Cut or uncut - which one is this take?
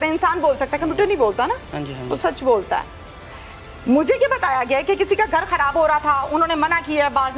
uncut